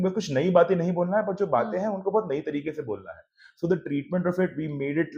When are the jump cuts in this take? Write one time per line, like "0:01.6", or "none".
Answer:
none